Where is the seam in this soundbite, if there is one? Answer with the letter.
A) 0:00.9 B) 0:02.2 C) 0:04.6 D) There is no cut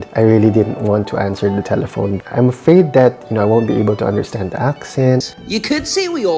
B